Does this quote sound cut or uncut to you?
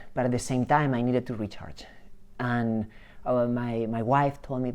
uncut